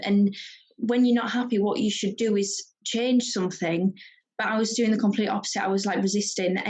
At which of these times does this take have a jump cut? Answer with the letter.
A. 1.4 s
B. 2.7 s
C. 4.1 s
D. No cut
B